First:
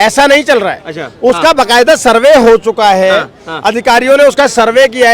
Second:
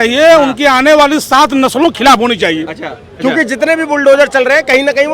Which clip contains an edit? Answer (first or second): second